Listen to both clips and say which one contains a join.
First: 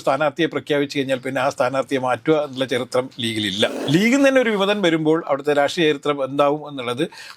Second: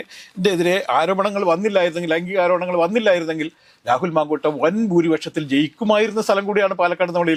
first; 1 cut; at 3.8 s

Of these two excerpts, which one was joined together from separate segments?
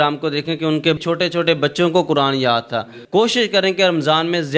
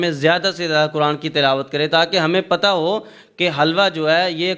first; 2 cuts; at 1.0 s, 3.0 s

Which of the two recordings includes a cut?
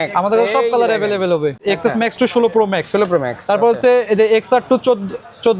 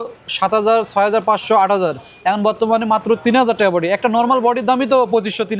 first; 1 cut; at 1.6 s

